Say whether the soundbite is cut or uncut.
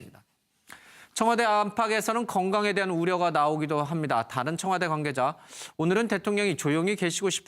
cut